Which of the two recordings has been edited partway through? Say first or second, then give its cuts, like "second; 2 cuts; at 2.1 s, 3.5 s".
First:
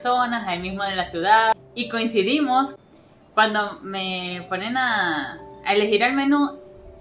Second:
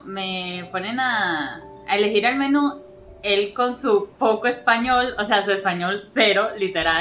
first; 2 cuts; at 1.6 s, 2.7 s